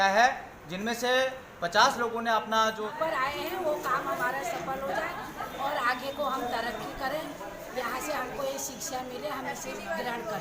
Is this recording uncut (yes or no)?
no